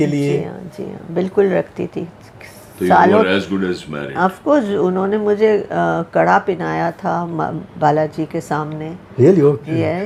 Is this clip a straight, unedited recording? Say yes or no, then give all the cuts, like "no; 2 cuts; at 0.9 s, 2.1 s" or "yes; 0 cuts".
yes; 0 cuts